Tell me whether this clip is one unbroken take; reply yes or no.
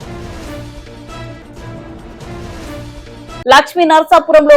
no